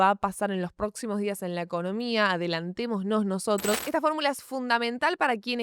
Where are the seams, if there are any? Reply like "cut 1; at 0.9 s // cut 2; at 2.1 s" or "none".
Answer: cut 1; at 3.8 s